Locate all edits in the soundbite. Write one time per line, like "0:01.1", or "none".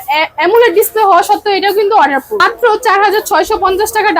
0:02.4